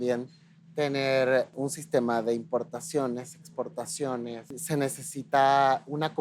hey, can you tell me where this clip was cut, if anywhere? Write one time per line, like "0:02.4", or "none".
0:01.5
0:04.5